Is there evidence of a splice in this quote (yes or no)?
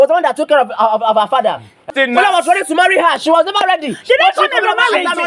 yes